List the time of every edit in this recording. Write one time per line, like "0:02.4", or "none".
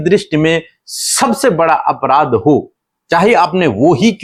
none